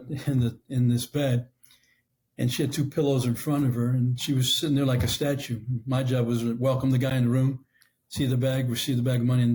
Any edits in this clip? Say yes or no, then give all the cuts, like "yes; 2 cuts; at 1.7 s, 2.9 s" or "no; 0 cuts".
no; 0 cuts